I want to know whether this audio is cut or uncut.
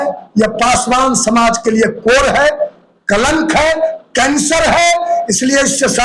uncut